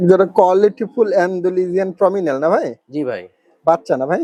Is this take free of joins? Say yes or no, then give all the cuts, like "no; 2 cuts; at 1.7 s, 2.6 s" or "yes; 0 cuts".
yes; 0 cuts